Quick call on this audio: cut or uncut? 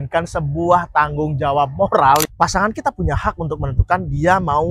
cut